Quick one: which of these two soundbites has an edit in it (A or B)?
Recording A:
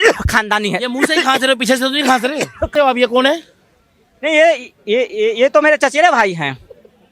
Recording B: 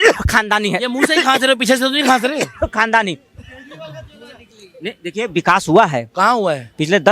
A